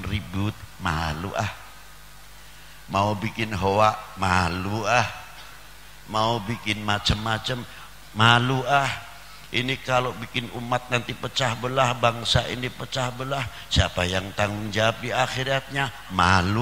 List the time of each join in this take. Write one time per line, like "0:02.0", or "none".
none